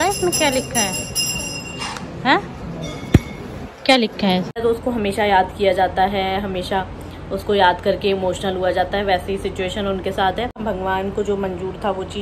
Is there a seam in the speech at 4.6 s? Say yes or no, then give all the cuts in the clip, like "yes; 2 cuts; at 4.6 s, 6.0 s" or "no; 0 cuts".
yes; 2 cuts; at 4.6 s, 10.6 s